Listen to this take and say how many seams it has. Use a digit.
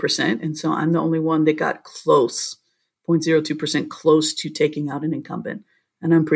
0